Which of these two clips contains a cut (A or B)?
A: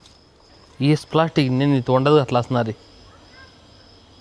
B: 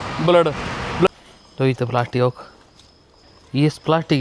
B